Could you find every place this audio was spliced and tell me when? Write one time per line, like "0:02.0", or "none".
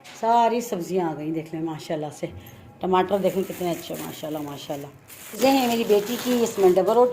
0:05.2